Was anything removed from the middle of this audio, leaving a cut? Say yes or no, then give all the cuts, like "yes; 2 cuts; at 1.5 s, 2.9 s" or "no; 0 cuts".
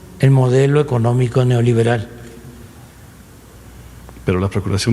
no; 0 cuts